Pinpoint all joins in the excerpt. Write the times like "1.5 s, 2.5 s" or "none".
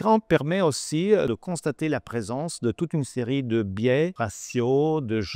1.3 s, 4.2 s